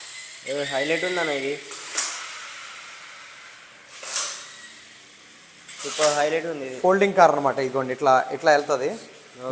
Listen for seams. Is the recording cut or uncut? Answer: uncut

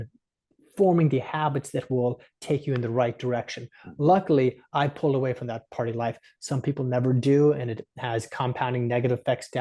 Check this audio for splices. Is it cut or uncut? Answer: uncut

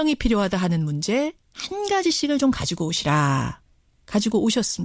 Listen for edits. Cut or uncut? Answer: cut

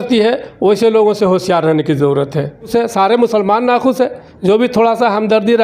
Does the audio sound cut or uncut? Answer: cut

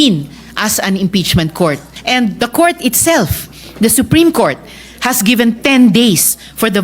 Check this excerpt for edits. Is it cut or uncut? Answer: cut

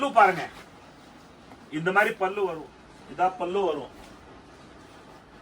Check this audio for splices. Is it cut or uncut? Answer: cut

